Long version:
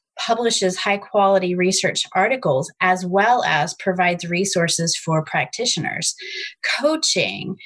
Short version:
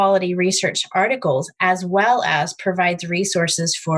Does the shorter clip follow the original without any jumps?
yes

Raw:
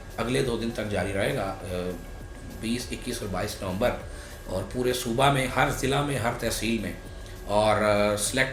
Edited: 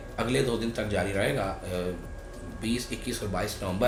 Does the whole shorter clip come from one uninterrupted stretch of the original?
yes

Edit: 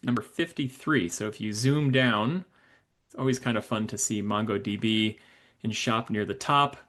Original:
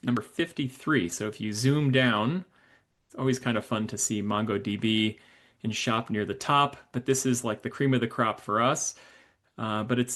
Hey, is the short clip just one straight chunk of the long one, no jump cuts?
yes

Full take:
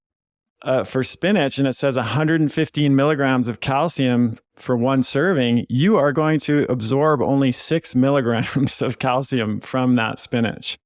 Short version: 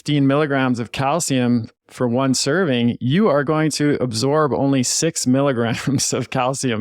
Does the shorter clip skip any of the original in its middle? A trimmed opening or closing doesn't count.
no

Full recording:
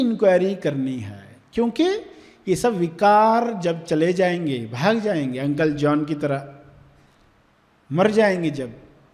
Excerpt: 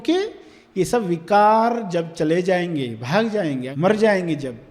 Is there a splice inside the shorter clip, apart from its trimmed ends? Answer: yes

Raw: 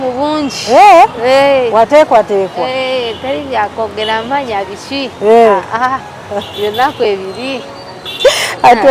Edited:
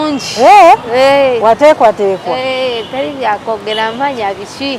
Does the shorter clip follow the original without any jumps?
yes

